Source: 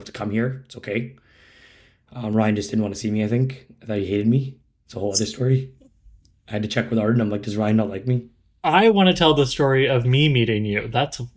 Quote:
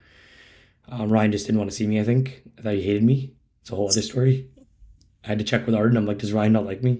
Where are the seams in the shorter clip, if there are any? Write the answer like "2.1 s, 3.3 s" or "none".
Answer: none